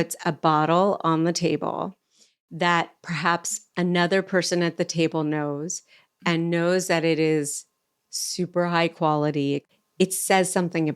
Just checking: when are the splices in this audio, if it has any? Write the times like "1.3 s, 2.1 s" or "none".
9.7 s